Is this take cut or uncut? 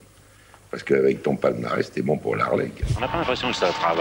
cut